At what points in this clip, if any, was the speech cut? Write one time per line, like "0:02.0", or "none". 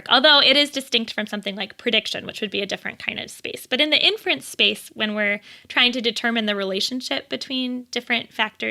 none